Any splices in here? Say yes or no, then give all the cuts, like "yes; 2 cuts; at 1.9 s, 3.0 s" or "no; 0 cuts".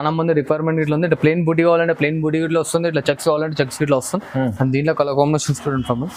no; 0 cuts